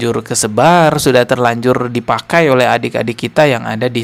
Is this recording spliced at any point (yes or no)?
no